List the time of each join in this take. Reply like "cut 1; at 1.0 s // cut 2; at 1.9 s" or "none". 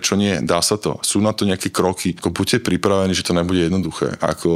cut 1; at 2.1 s